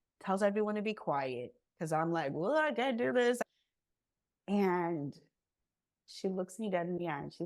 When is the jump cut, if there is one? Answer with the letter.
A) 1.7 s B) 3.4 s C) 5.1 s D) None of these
B